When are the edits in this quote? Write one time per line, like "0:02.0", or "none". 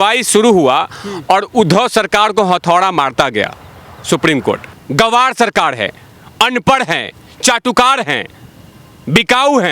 0:04.8